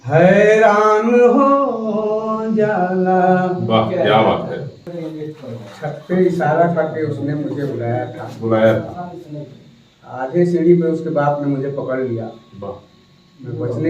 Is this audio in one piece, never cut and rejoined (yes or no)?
no